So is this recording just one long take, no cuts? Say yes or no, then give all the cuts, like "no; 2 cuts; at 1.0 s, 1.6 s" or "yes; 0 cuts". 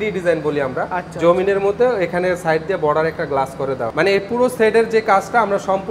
yes; 0 cuts